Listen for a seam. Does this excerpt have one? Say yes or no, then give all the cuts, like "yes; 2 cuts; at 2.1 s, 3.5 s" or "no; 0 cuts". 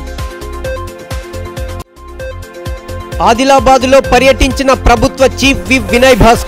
yes; 2 cuts; at 1.3 s, 2.7 s